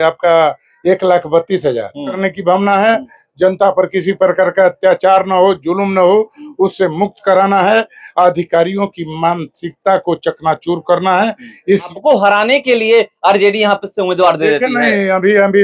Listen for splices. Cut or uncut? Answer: cut